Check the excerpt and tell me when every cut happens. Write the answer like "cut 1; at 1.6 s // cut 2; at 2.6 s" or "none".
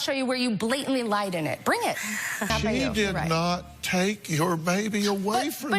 cut 1; at 2.5 s